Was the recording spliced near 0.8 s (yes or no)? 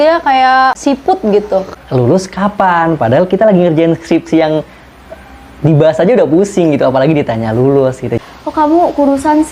yes